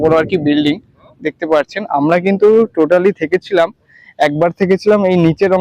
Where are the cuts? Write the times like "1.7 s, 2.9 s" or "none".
none